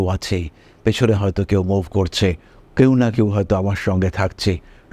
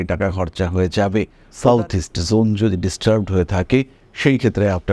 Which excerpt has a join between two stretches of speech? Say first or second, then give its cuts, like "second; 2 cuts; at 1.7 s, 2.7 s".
second; 1 cut; at 1.4 s